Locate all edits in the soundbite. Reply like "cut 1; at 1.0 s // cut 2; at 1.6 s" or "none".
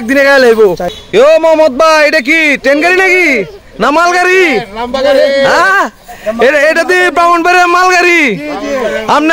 cut 1; at 1.3 s